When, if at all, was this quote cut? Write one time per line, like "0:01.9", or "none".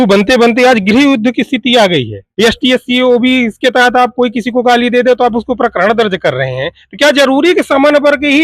0:02.2

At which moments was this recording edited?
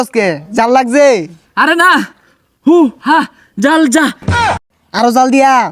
0:04.4

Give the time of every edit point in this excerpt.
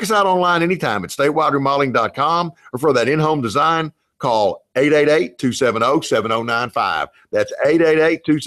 none

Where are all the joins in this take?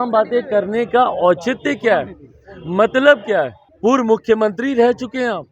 0:03.6

